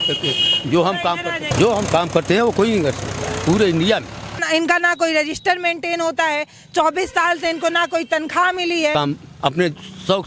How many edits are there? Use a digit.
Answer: 3